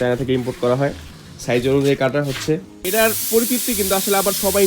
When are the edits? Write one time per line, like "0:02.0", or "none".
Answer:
0:02.7